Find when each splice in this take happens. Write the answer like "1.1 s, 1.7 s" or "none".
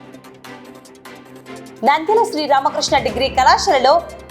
1.8 s